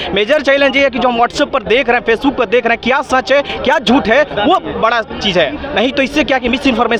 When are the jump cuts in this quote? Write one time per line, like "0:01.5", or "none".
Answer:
none